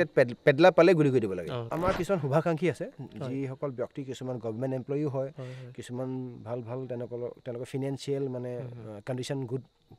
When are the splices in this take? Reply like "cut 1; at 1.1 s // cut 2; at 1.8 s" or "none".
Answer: cut 1; at 1.6 s